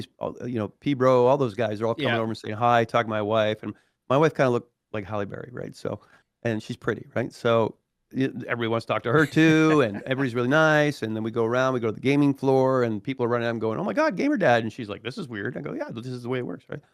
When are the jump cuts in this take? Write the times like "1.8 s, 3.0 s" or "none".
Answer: none